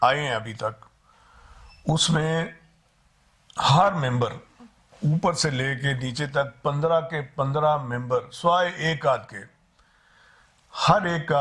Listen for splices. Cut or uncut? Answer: uncut